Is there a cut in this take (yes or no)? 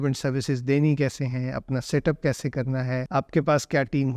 yes